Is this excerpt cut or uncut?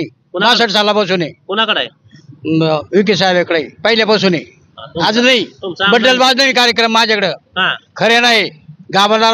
uncut